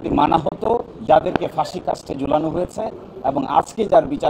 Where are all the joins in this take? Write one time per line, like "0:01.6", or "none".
0:00.9